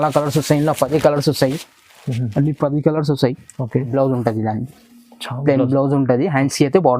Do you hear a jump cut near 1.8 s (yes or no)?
no